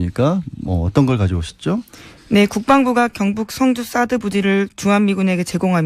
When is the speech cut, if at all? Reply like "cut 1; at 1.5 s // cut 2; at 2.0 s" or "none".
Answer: cut 1; at 3.1 s